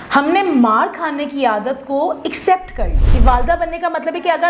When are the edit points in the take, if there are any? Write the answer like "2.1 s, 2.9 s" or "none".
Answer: 3.1 s